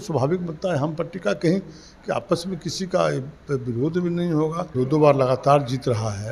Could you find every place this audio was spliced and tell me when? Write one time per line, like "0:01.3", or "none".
0:04.7